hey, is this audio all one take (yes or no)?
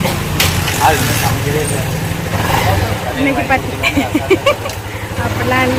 yes